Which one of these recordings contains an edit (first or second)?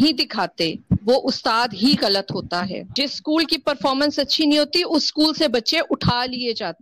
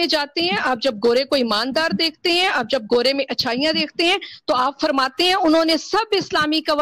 first